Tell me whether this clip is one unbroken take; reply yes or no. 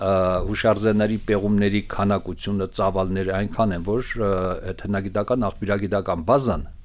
yes